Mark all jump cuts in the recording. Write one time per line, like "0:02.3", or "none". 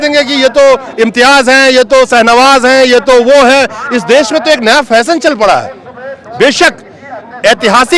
none